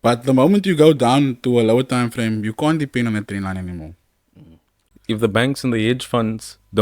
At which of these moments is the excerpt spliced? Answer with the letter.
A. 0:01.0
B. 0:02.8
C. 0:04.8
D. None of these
C